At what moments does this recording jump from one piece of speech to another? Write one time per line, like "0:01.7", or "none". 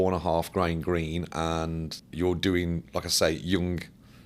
0:02.0